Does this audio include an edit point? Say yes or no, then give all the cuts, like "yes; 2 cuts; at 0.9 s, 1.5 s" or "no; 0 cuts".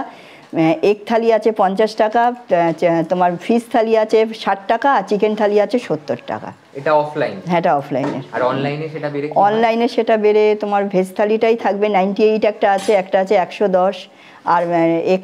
no; 0 cuts